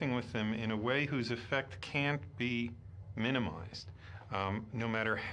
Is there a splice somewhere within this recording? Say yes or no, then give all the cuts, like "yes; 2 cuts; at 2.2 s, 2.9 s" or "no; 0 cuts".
yes; 1 cut; at 1.2 s